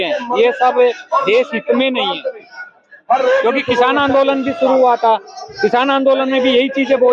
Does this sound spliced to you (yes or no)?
no